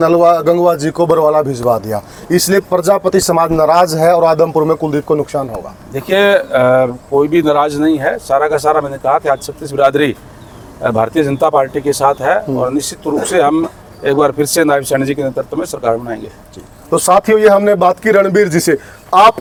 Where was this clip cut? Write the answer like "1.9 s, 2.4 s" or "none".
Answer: none